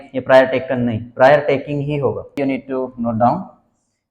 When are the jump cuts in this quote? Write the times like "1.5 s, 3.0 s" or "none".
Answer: 2.4 s